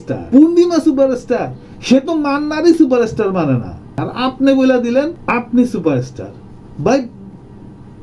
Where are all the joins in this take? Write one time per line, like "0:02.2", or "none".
0:04.1
0:05.2